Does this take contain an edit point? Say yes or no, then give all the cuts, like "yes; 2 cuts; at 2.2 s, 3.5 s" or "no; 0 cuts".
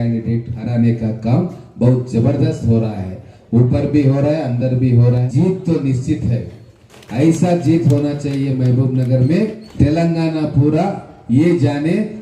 yes; 3 cuts; at 5.2 s, 6.9 s, 9.6 s